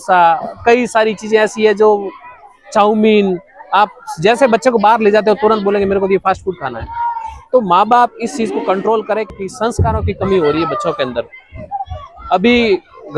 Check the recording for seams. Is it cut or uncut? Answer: cut